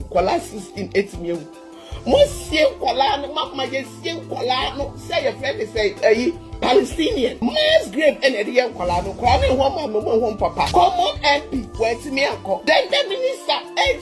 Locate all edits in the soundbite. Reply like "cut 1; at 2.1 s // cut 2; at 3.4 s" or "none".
cut 1; at 7.4 s // cut 2; at 10.7 s // cut 3; at 12.6 s